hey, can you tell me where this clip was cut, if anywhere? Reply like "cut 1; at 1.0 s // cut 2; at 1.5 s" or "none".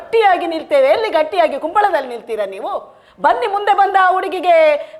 none